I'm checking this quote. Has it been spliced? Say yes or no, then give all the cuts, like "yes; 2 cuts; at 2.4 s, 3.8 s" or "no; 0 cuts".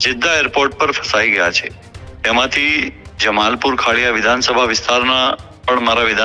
no; 0 cuts